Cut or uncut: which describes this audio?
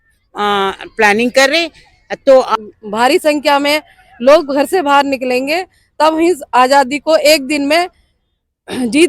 cut